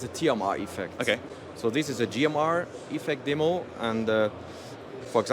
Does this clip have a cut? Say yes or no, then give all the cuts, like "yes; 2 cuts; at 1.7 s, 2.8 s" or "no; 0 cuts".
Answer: no; 0 cuts